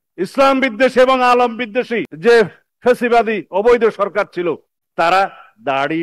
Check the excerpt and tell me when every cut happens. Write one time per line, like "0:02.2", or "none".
0:02.0